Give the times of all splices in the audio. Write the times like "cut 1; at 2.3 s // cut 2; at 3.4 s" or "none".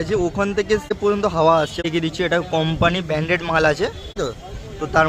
cut 1; at 1.0 s // cut 2; at 1.9 s // cut 3; at 4.2 s